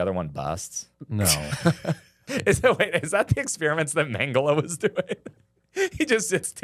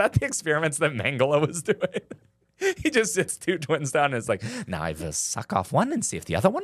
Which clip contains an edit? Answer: first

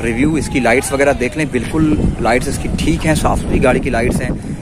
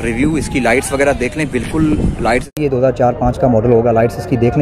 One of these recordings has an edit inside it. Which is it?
second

